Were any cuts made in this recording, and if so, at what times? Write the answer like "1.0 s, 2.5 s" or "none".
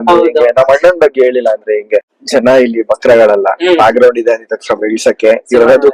2.2 s